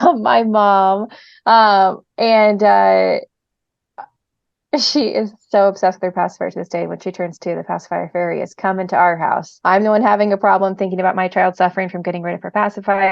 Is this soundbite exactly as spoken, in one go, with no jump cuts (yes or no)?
no